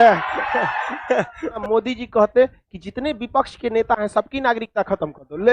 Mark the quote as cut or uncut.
cut